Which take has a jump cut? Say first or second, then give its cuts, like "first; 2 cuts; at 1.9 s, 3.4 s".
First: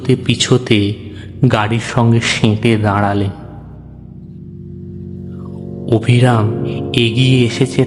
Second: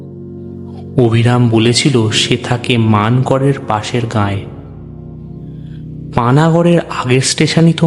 second; 3 cuts; at 0.9 s, 4.4 s, 6.1 s